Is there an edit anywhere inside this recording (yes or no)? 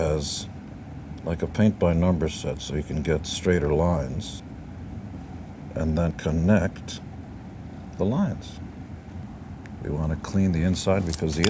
yes